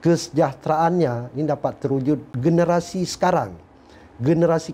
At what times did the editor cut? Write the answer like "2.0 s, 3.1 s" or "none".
2.3 s